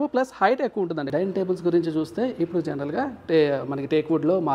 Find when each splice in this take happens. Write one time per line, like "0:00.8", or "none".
0:01.0